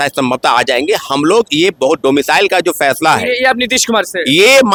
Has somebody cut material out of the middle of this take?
no; 0 cuts

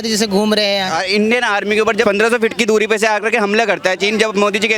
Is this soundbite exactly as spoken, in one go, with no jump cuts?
no; 2 cuts; at 0.9 s, 2.0 s

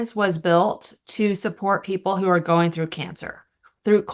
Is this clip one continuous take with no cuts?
yes; 0 cuts

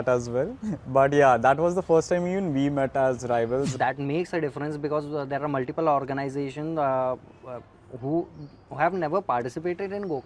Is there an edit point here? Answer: yes; 1 cut; at 3.7 s

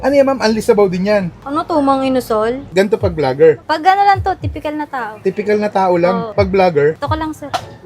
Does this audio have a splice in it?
yes; 2 cuts; at 2.6 s, 6.3 s

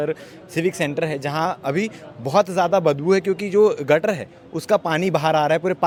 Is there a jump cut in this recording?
no; 0 cuts

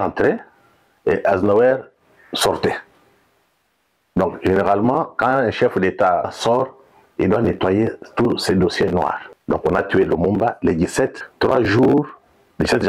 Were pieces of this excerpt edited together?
yes; 3 cuts; at 6.3 s, 9.3 s, 11.2 s

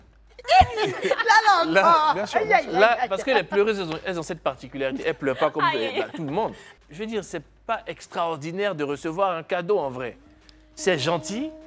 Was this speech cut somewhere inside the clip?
yes; 1 cut; at 6.7 s

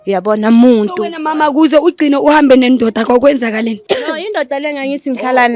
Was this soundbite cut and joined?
yes; 1 cut; at 3.8 s

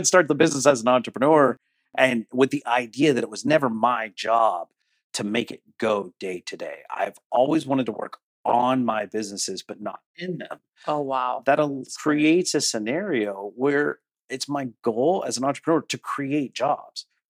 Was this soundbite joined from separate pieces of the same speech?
no; 0 cuts

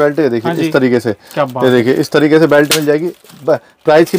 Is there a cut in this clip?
no; 0 cuts

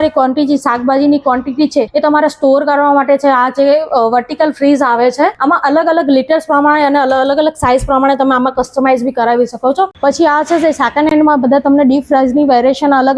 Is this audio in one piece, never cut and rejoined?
no; 3 cuts; at 1.9 s, 5.4 s, 9.9 s

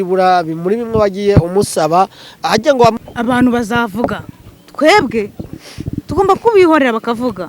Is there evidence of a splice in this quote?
yes; 1 cut; at 3.0 s

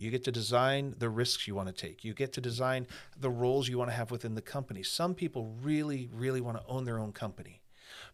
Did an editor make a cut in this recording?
no; 0 cuts

